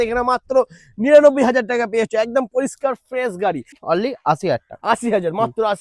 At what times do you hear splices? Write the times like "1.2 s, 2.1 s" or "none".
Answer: 3.7 s